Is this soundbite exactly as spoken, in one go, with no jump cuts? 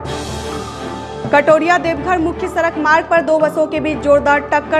yes; 0 cuts

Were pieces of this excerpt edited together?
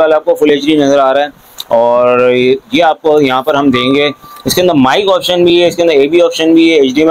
no; 0 cuts

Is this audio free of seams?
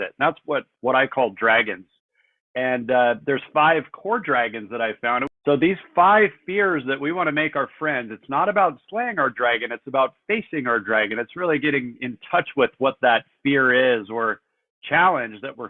no; 1 cut; at 5.3 s

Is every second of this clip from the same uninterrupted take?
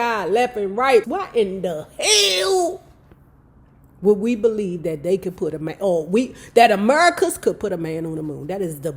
no; 1 cut; at 1.1 s

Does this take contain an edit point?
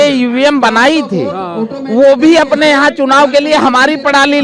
no; 0 cuts

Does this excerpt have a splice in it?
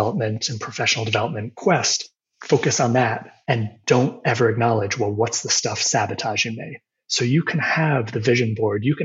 yes; 2 cuts; at 1.5 s, 3.3 s

